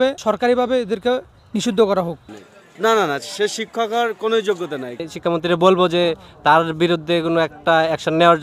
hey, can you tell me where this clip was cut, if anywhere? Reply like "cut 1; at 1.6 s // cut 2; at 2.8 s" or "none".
cut 1; at 2.2 s // cut 2; at 5.1 s